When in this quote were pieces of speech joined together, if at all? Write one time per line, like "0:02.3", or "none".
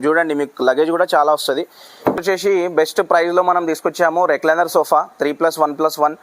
0:02.2